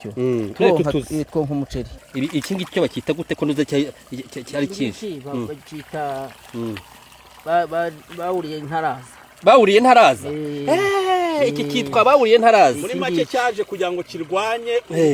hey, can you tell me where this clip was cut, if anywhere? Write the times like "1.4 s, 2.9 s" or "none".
1.9 s